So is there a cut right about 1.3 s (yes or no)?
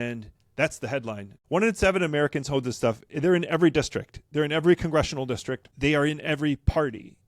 yes